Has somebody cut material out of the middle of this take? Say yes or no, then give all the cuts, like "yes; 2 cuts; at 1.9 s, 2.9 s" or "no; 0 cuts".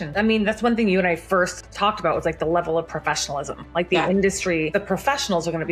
yes; 1 cut; at 4.7 s